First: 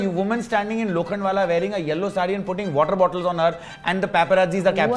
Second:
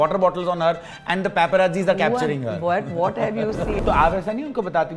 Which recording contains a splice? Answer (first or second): second